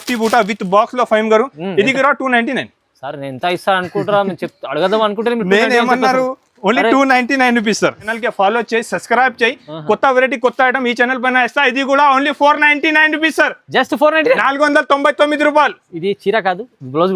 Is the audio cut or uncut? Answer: cut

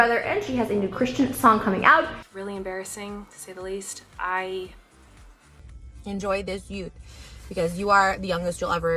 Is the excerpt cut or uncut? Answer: uncut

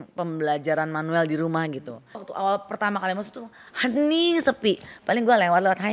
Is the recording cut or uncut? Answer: cut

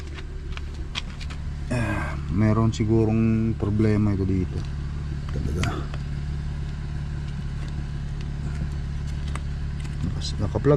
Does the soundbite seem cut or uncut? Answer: uncut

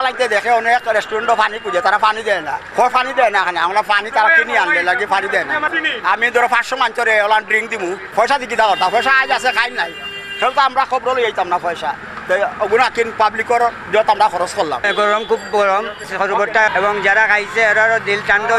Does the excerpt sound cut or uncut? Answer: cut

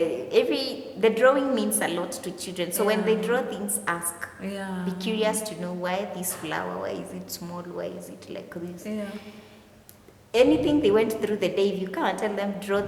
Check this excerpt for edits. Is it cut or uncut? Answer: uncut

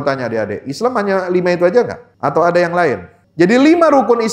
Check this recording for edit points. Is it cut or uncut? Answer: cut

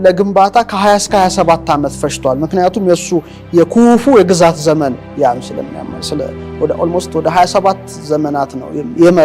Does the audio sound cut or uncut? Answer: uncut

